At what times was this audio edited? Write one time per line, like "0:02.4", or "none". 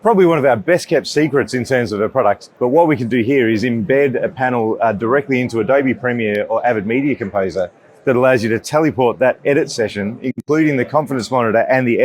0:02.5